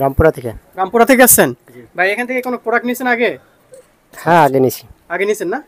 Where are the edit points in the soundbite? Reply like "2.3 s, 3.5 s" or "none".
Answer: none